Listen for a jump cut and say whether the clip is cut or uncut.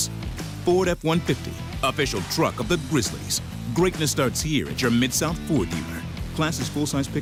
uncut